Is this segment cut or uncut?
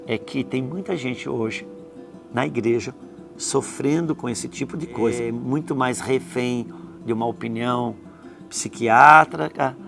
cut